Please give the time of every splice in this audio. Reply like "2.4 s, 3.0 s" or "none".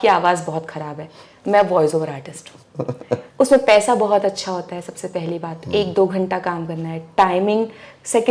3.3 s